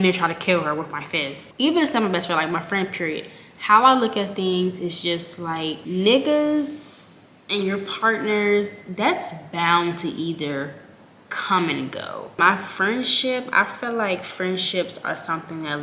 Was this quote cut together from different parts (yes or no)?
no